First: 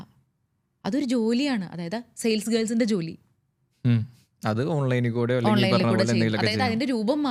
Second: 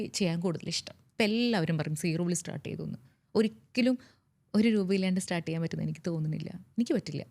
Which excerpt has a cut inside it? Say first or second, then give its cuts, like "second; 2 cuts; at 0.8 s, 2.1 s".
second; 1 cut; at 1.1 s